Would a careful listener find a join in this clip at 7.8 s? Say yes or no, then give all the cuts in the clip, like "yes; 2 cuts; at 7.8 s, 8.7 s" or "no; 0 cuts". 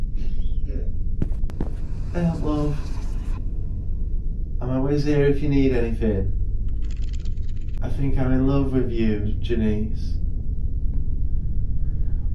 yes; 1 cut; at 7.8 s